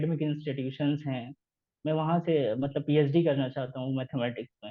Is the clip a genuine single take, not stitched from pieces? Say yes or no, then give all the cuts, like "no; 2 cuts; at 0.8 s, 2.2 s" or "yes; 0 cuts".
yes; 0 cuts